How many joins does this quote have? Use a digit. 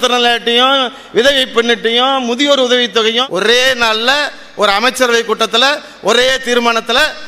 1